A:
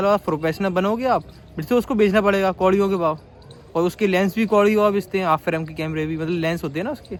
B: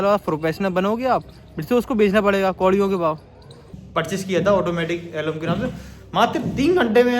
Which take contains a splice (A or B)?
B